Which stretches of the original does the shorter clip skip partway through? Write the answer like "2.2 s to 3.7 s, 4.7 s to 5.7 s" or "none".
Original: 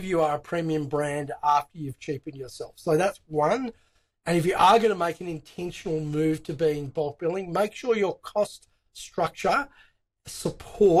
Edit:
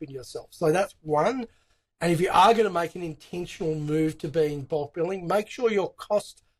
none